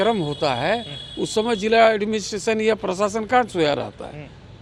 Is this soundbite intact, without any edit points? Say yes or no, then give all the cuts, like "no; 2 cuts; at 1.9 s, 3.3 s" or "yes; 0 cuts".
yes; 0 cuts